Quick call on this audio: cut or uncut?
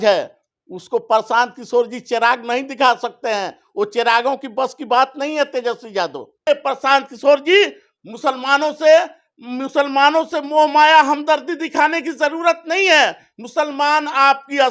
cut